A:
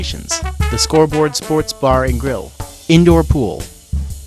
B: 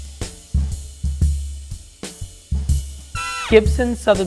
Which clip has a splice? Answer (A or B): B